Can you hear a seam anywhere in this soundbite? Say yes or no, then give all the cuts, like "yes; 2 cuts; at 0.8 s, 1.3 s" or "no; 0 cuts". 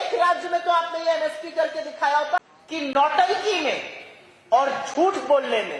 yes; 1 cut; at 2.4 s